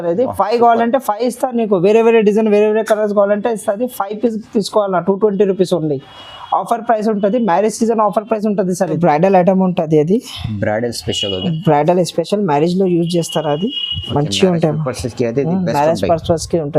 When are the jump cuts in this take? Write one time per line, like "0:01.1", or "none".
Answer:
0:08.9